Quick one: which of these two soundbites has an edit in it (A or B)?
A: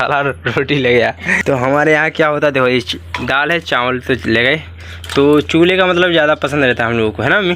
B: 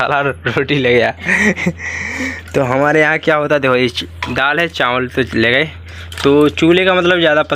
A